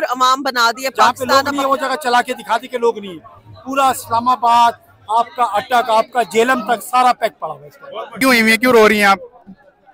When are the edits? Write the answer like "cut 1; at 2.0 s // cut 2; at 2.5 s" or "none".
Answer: cut 1; at 1.2 s // cut 2; at 8.2 s